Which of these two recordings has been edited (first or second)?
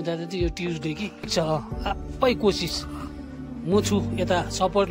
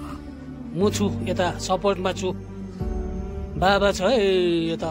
first